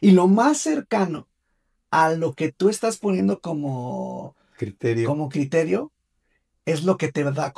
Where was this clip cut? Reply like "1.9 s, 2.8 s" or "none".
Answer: none